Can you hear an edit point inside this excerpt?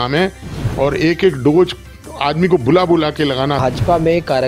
yes; 1 cut; at 3.6 s

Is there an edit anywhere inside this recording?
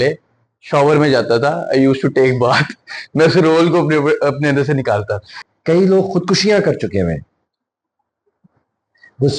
yes; 1 cut; at 5.5 s

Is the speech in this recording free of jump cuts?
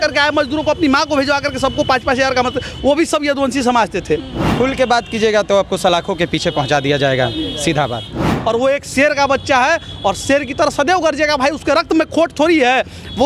no; 2 cuts; at 4.4 s, 8.3 s

